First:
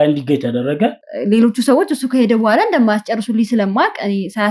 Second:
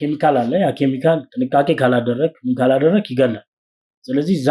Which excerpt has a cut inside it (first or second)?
first